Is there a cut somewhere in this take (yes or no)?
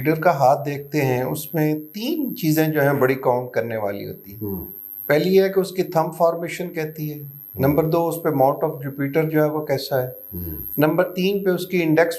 no